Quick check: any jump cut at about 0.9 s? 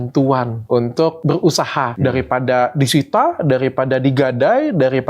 yes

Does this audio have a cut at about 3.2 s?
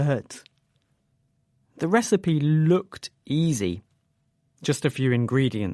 no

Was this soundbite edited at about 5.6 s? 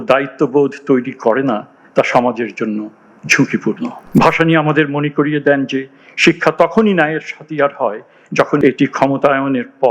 no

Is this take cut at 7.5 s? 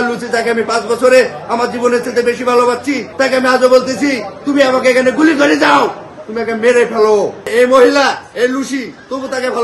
yes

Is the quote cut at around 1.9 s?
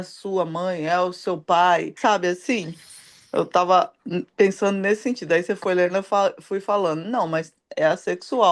yes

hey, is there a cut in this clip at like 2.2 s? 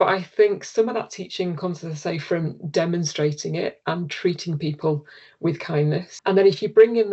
no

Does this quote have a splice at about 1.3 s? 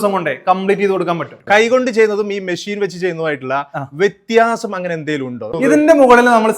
yes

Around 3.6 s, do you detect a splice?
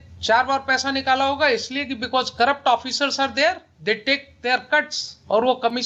no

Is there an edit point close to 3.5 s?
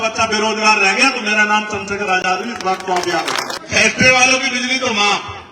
yes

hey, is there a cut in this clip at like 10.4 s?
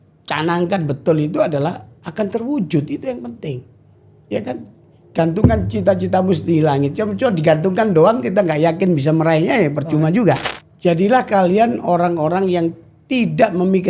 yes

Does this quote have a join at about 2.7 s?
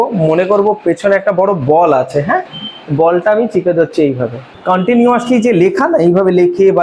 no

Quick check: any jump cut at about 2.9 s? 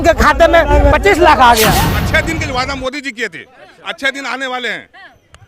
no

